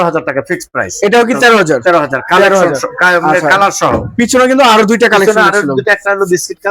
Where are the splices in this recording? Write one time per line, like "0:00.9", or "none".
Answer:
none